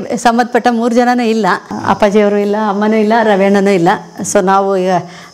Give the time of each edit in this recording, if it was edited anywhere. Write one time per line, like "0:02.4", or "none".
0:01.7